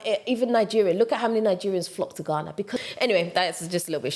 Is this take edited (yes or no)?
yes